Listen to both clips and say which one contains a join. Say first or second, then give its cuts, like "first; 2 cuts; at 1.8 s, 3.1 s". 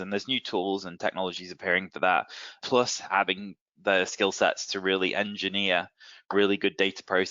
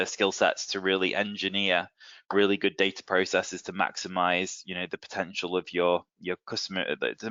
first; 1 cut; at 2.6 s